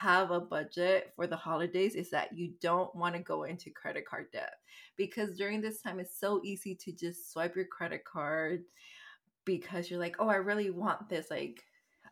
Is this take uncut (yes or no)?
yes